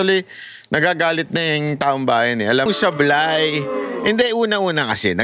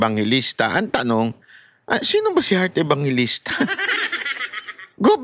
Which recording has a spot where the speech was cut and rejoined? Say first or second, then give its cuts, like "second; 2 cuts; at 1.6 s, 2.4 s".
first; 1 cut; at 2.7 s